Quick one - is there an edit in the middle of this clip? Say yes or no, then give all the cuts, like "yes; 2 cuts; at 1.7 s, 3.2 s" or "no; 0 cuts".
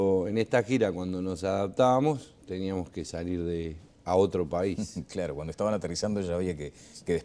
no; 0 cuts